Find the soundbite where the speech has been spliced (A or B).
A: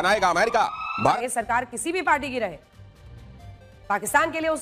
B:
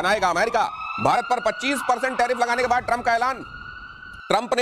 A